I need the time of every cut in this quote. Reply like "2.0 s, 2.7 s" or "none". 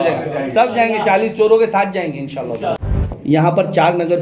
2.8 s